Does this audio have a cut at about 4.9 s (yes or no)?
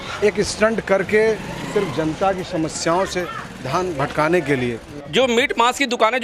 yes